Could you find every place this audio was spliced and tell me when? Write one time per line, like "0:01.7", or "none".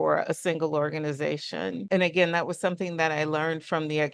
0:01.8